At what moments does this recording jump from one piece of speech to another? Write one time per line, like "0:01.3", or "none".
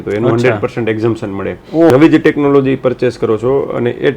0:01.9